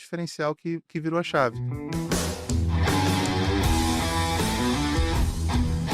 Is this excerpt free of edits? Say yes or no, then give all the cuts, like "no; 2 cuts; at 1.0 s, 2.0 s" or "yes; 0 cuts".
no; 1 cut; at 1.9 s